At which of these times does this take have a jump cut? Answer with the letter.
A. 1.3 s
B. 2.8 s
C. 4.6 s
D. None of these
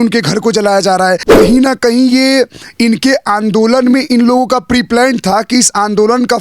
A